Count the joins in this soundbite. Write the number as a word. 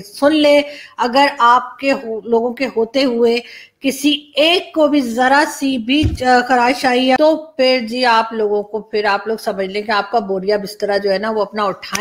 one